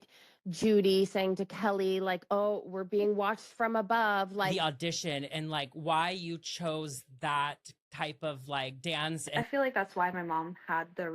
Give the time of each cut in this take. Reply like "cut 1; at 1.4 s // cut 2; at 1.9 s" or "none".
cut 1; at 4.5 s // cut 2; at 9.3 s